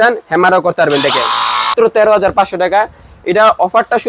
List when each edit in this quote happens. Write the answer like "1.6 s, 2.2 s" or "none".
1.7 s